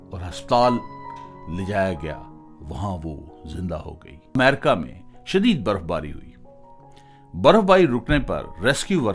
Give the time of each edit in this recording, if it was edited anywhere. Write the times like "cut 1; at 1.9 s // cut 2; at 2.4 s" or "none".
cut 1; at 4.3 s